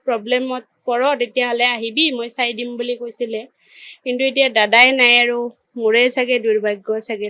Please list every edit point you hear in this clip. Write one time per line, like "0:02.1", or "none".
none